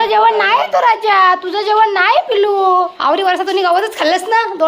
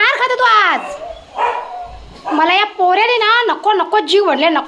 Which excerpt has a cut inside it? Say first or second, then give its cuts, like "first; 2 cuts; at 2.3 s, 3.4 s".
first; 1 cut; at 3.0 s